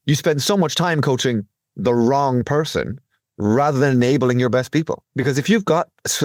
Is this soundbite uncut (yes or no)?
yes